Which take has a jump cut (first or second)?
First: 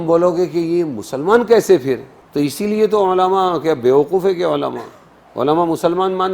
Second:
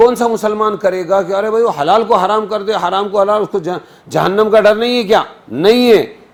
first